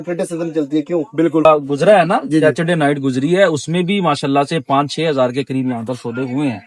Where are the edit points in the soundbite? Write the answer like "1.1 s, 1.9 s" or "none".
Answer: 1.5 s